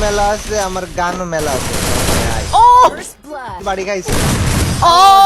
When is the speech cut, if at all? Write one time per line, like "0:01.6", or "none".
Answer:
0:03.6